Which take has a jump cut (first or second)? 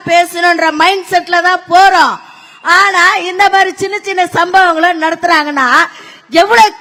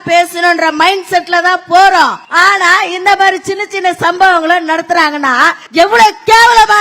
second